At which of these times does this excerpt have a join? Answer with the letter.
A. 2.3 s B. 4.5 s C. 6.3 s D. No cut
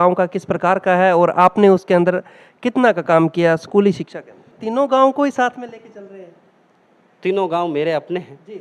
B